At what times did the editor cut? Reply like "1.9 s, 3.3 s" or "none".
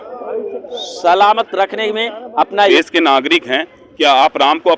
2.7 s